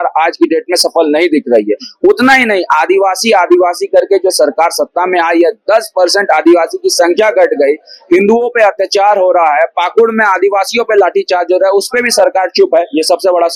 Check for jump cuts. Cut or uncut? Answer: uncut